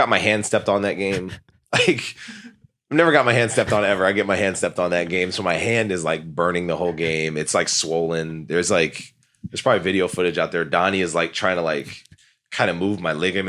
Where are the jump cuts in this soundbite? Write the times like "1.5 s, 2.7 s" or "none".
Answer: none